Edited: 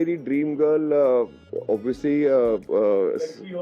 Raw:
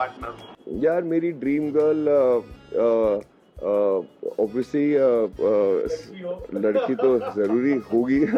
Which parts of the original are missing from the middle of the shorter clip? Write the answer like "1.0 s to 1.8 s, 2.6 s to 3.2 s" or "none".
2.6 s to 4.1 s